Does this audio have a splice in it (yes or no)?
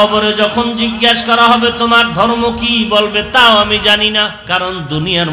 yes